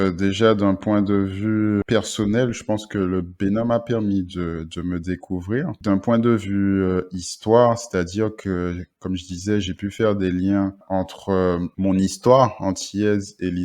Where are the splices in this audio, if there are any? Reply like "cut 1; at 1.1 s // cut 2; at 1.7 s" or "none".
cut 1; at 1.8 s